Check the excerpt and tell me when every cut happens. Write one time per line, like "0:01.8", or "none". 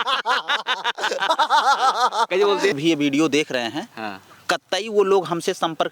0:02.7